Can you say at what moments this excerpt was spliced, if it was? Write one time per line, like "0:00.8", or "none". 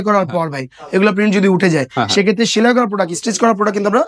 none

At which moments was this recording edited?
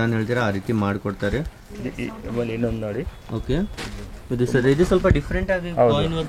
none

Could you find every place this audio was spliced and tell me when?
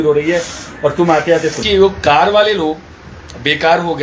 0:01.6

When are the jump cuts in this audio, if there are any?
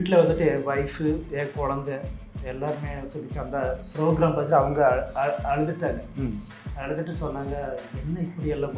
none

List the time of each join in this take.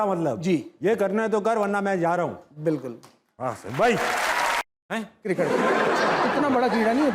0:04.6

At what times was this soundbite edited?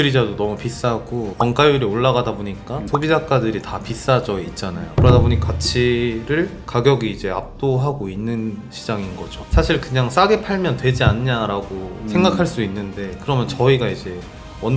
none

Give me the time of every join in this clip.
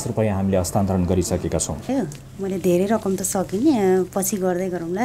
0:01.9

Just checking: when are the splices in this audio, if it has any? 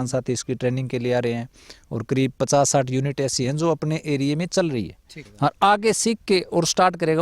0:05.2

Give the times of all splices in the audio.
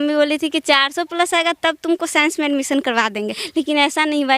0:03.4

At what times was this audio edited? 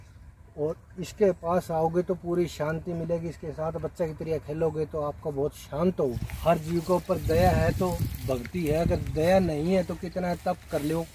0:06.3

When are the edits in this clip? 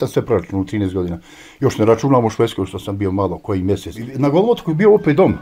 0:04.0

